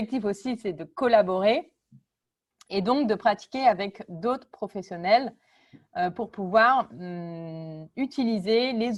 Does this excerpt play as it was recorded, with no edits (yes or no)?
yes